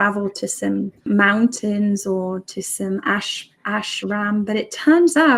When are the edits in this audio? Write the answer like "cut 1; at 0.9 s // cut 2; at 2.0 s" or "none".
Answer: cut 1; at 1.0 s